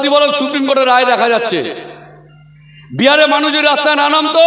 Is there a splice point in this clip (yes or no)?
no